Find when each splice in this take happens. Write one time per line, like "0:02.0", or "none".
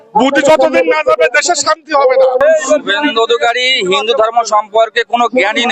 0:02.4